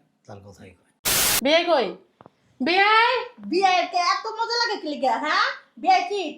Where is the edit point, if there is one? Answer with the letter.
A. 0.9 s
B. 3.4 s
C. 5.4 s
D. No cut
A